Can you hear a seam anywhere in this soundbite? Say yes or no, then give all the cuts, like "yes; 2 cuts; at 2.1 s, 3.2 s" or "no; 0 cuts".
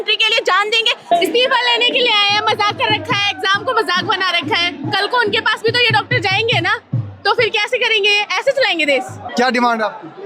yes; 2 cuts; at 1.0 s, 9.2 s